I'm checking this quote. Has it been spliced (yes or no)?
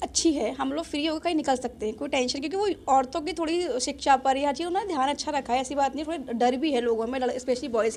no